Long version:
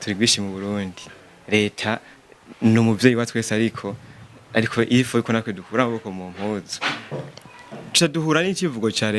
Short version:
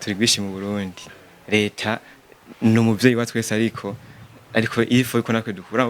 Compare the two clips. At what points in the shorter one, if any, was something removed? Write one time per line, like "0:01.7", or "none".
none